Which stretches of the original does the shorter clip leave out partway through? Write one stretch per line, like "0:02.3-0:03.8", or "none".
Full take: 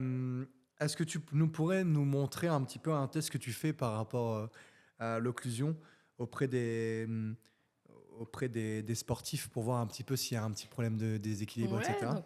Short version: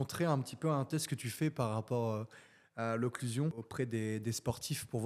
0:05.9-0:08.3